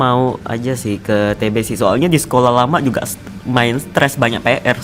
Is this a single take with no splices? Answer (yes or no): yes